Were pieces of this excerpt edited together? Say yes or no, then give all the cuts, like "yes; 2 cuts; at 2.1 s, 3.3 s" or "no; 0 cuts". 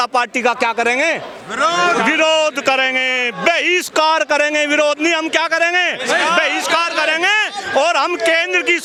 no; 0 cuts